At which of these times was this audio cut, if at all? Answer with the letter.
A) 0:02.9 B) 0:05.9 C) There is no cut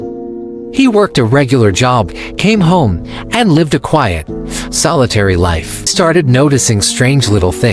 B